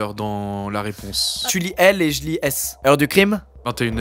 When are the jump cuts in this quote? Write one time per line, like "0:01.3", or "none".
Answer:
none

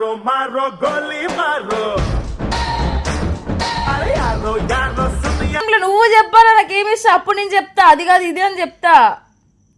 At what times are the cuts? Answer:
0:05.7

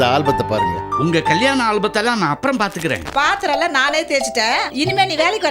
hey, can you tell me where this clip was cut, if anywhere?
0:03.1

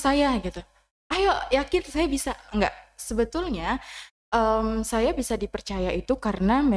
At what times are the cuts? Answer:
none

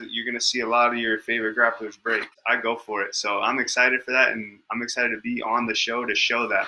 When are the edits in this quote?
0:02.4

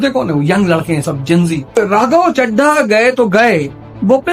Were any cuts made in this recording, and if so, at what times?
0:01.8

